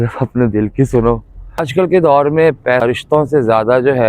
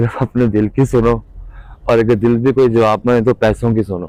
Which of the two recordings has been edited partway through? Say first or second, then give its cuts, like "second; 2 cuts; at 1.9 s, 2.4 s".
first; 2 cuts; at 1.7 s, 2.9 s